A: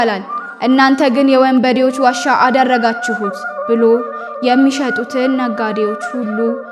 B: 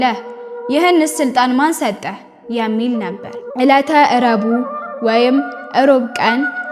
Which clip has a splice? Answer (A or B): B